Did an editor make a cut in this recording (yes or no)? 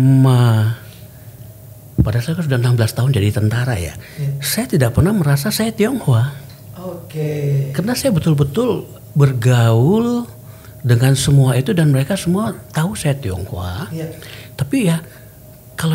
no